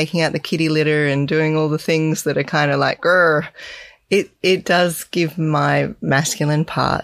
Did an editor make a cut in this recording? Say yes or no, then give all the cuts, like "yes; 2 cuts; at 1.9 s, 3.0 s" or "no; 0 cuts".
no; 0 cuts